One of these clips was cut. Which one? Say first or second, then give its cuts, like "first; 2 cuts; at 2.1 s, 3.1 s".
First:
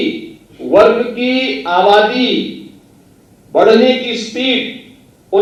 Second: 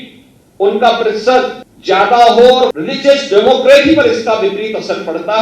second; 2 cuts; at 1.7 s, 2.8 s